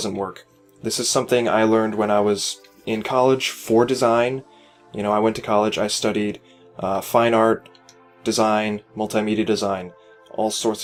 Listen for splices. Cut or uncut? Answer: uncut